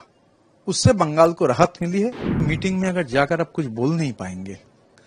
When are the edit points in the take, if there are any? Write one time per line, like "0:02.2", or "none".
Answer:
0:02.5